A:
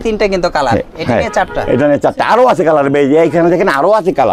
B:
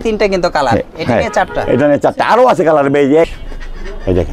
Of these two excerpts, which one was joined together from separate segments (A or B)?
B